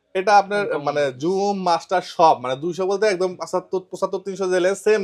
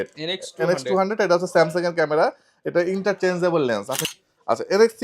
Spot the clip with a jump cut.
second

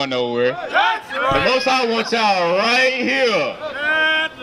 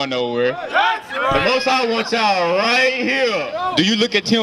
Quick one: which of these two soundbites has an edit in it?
second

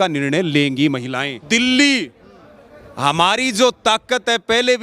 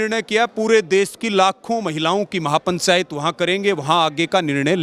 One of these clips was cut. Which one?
first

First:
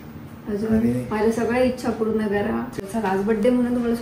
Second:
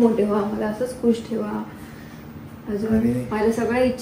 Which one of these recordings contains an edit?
first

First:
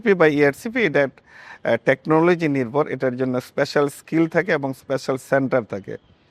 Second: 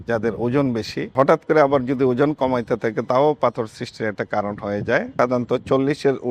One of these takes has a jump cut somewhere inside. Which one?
second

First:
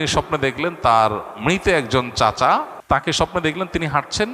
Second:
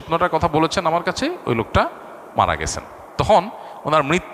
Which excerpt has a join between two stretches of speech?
first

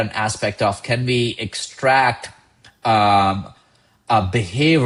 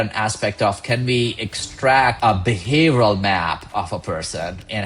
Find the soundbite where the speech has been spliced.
second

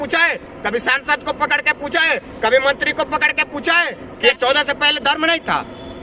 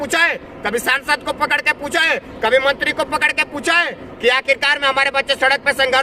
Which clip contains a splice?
first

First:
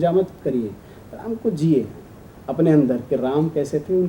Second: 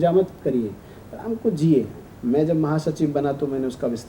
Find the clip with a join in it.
second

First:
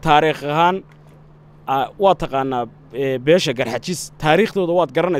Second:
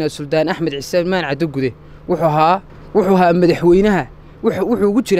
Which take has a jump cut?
second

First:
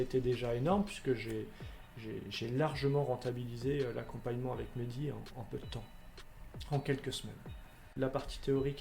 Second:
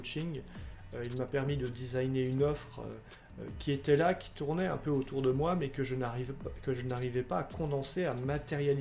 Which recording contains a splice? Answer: first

